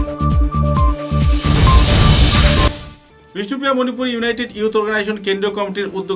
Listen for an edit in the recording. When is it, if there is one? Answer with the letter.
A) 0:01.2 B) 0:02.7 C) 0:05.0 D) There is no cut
B